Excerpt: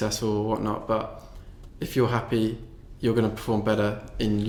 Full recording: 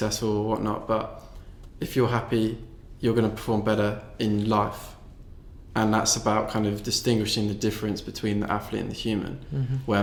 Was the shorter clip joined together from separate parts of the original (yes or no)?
no